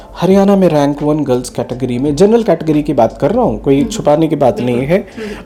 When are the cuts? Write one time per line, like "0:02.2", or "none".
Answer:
none